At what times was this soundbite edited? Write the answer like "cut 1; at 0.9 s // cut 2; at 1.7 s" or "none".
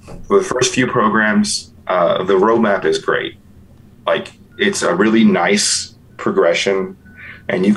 cut 1; at 4.5 s